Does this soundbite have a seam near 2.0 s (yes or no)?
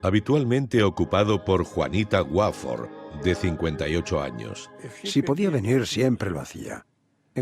no